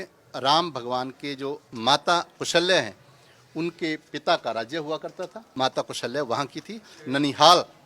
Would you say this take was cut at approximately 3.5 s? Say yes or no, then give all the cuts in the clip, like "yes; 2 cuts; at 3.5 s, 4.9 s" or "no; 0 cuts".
no; 3 cuts; at 1.7 s, 5.4 s, 6.9 s